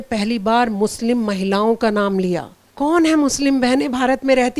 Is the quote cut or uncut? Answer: cut